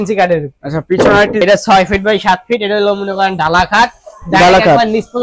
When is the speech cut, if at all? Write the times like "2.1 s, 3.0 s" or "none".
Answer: 1.4 s